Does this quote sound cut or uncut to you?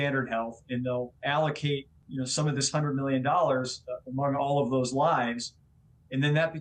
cut